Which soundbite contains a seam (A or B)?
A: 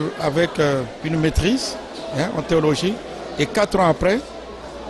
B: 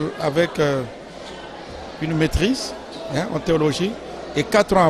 A